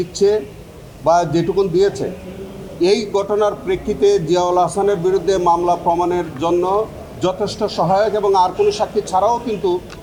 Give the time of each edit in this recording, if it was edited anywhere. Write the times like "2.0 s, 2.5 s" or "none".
none